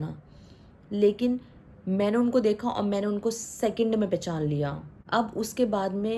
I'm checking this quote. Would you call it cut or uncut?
cut